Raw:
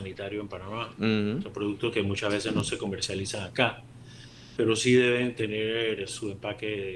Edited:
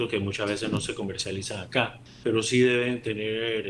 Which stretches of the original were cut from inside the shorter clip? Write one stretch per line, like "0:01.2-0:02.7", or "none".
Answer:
0:03.9-0:04.4